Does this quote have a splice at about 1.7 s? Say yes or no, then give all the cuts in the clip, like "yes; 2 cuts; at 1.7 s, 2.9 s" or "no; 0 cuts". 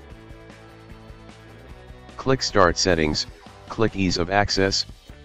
yes; 1 cut; at 1.7 s